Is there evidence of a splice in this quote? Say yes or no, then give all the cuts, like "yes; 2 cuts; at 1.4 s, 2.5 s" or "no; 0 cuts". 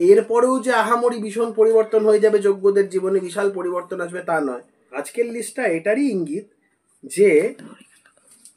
yes; 1 cut; at 4.8 s